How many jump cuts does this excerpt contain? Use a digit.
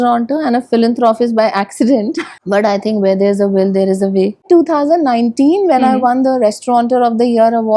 2